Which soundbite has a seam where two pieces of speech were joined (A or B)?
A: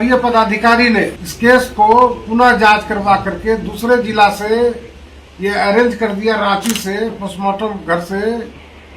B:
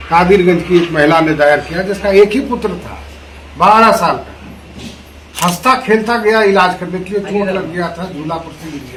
A